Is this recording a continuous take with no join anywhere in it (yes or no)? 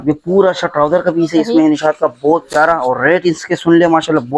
yes